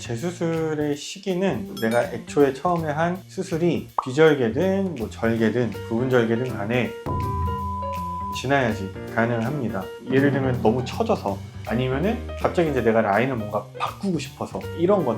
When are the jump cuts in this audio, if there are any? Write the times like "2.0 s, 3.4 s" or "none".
9.9 s